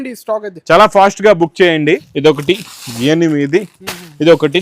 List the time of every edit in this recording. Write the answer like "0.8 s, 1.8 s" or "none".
2.1 s